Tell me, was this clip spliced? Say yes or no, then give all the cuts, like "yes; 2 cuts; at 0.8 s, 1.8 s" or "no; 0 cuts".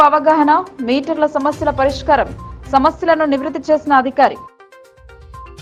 no; 0 cuts